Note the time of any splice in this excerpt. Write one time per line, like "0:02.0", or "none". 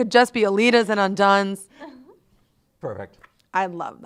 none

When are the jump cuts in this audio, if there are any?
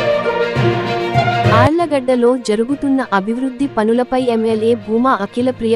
0:01.5

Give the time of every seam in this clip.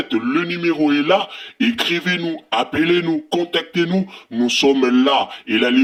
none

